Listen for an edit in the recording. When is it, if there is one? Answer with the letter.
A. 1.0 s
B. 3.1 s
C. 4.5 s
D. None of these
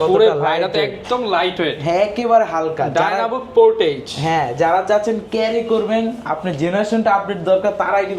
D